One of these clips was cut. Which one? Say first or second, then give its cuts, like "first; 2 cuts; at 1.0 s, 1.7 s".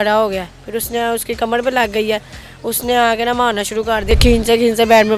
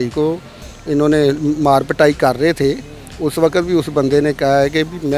first; 1 cut; at 4.0 s